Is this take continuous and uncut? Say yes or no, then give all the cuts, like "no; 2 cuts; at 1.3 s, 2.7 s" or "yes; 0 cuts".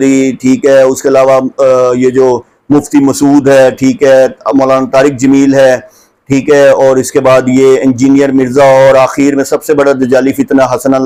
yes; 0 cuts